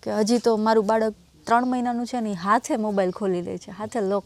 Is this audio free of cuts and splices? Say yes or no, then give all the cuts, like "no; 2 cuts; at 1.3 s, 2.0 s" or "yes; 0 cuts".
yes; 0 cuts